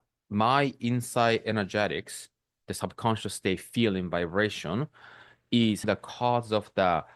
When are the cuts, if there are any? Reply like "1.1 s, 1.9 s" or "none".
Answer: 5.8 s